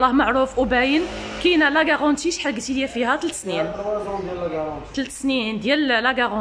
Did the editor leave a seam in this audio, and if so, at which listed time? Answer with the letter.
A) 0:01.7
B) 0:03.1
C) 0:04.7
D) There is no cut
D